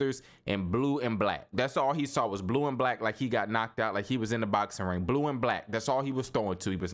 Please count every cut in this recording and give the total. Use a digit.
0